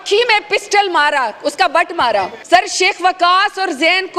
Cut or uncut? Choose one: cut